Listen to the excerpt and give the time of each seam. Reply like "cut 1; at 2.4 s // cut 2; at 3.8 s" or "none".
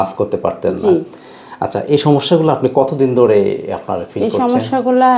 none

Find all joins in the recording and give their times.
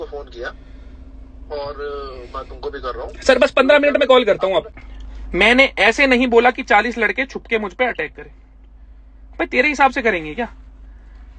cut 1; at 4.8 s

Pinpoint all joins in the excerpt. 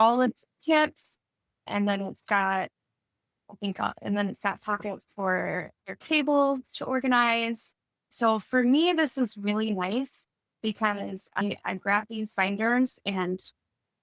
none

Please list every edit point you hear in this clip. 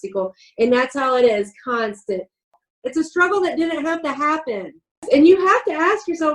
cut 1; at 2.5 s // cut 2; at 5.0 s

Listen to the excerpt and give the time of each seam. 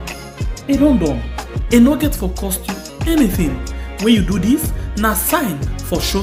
none

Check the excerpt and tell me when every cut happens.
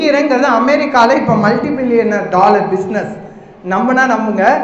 none

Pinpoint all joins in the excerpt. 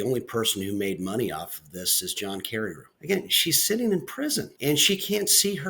cut 1; at 2.9 s // cut 2; at 4.5 s

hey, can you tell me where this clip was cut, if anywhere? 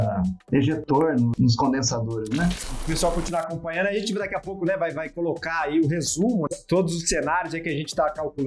cut 1; at 1.3 s // cut 2; at 2.8 s

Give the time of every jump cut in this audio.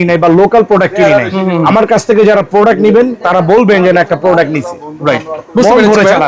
none

